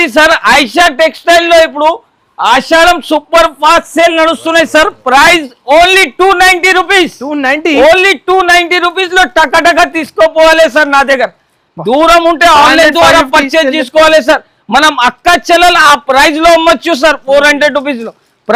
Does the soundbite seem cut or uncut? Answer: uncut